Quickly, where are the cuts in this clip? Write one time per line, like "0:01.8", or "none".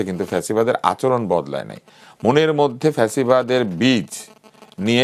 none